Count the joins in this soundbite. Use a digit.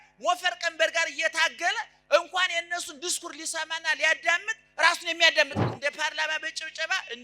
1